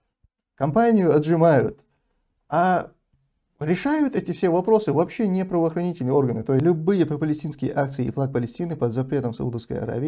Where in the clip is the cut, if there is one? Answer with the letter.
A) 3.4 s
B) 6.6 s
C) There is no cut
B